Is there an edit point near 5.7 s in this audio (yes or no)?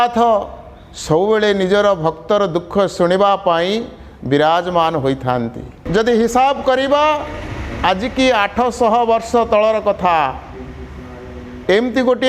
yes